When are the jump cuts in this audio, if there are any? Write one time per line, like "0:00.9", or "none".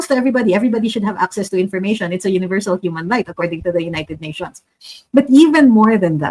none

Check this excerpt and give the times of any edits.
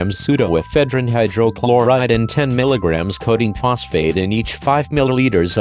none

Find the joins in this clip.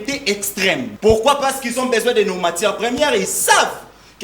0:00.9

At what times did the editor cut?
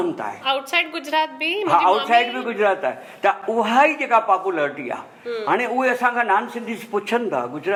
none

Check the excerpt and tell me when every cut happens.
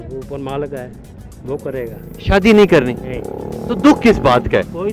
none

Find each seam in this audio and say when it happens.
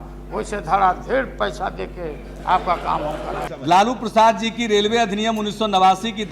0:03.5

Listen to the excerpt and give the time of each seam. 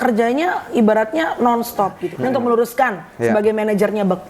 0:02.1

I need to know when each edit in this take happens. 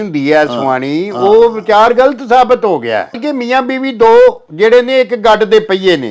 0:03.2

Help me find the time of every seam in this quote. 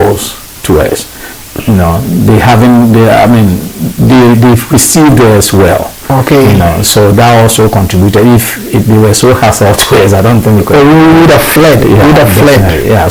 none

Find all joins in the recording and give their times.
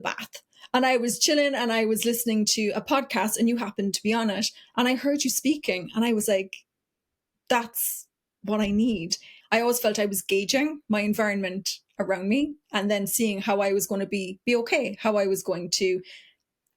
0:09.3

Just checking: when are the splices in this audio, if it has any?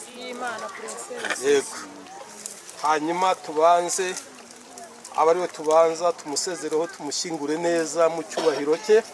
none

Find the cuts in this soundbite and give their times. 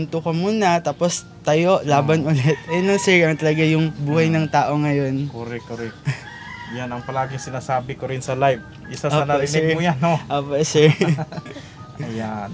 none

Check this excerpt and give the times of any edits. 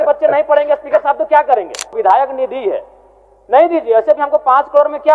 0:02.0

